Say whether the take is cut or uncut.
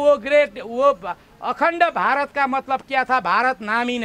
uncut